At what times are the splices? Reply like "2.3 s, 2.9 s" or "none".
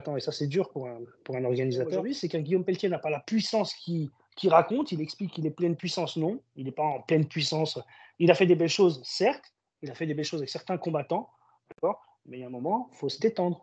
2.0 s